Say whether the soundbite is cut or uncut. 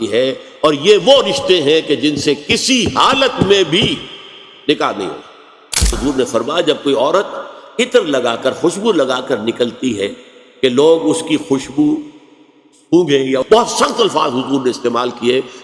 cut